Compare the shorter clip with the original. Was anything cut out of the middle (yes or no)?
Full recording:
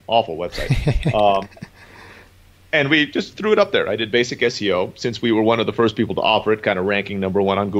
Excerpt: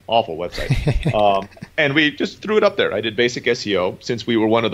yes